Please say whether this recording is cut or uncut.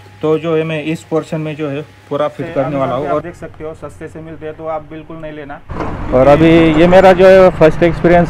cut